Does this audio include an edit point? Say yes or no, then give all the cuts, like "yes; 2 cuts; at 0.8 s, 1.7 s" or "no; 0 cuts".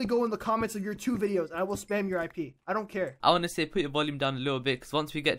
no; 0 cuts